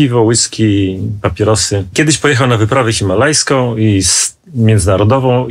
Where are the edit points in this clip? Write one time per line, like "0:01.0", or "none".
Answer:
none

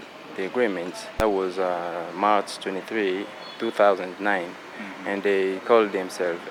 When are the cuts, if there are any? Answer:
none

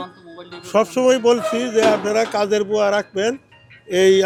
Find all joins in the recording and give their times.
none

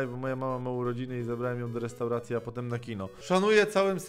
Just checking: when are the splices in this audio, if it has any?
0:03.2

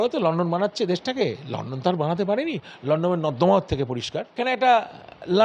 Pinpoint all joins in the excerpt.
0:04.3

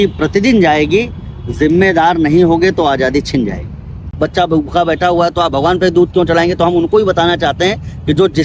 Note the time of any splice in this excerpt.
0:04.1

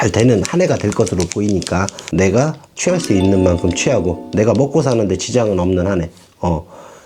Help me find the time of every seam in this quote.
0:02.0

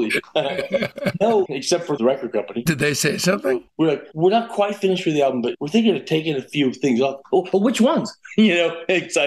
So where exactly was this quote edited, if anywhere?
0:02.0
0:03.7
0:05.5

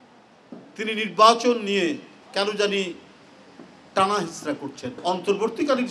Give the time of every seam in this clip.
0:04.9

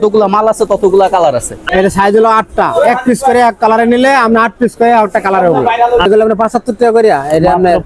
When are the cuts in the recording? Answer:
0:01.7
0:06.1

